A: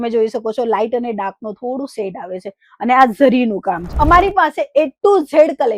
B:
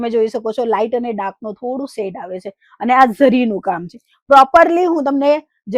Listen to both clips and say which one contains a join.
A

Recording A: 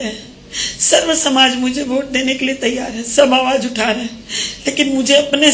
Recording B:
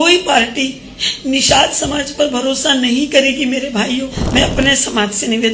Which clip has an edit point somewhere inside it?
B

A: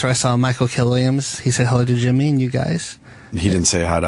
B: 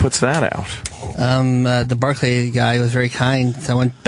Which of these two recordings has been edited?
A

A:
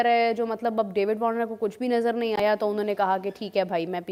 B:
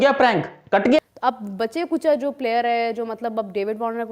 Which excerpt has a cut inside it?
B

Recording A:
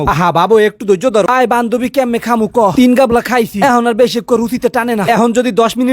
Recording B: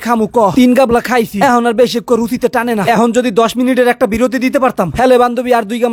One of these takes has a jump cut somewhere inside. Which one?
A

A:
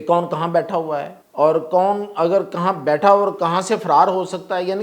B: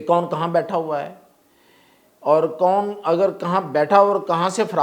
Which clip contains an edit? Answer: A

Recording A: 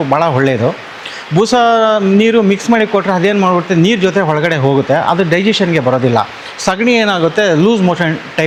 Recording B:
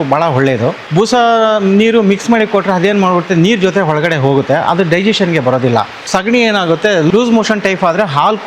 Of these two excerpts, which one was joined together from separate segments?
B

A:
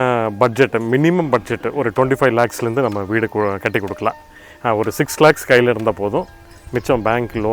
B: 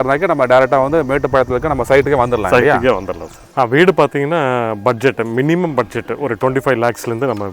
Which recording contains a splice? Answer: B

